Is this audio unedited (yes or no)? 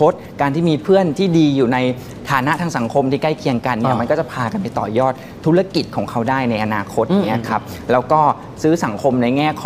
yes